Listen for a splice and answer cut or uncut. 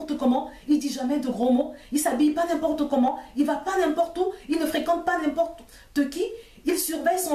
uncut